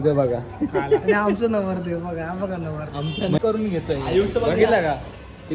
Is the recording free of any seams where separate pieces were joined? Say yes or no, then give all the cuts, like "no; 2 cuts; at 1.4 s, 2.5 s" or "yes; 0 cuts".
no; 1 cut; at 3.4 s